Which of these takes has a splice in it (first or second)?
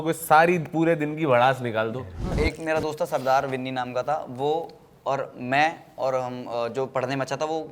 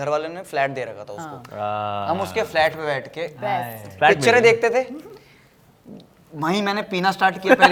first